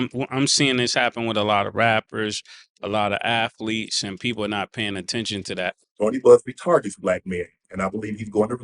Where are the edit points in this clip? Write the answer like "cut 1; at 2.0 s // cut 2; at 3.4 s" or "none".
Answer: cut 1; at 5.8 s

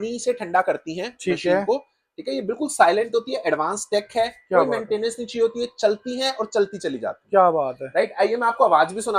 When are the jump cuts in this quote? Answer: none

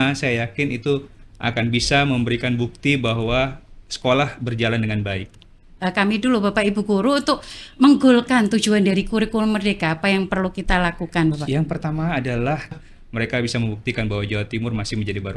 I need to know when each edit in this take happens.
cut 1; at 5.7 s // cut 2; at 12.7 s

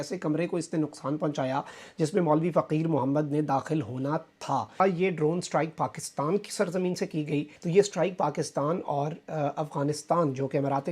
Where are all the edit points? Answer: cut 1; at 4.8 s // cut 2; at 7.6 s

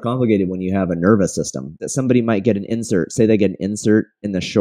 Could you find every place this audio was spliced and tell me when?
cut 1; at 1.8 s

